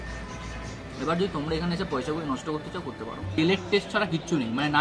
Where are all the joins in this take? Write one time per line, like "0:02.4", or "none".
0:03.4